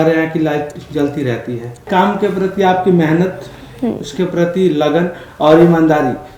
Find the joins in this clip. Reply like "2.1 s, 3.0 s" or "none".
1.9 s